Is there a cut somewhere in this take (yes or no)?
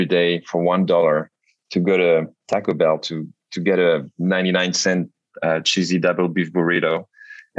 no